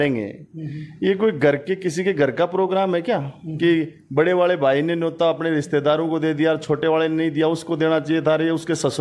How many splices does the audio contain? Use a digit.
0